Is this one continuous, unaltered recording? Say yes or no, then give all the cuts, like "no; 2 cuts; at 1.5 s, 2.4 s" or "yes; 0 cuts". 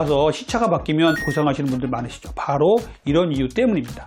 no; 1 cut; at 1.3 s